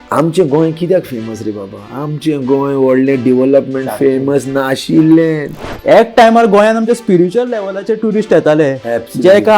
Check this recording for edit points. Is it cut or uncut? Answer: cut